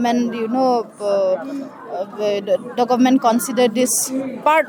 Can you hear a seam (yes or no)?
no